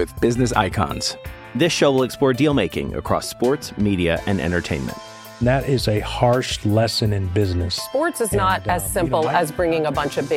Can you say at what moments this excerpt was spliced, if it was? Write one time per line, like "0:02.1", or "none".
none